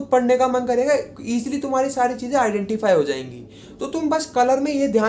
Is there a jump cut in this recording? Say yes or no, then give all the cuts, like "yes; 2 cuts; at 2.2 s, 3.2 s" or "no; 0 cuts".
no; 0 cuts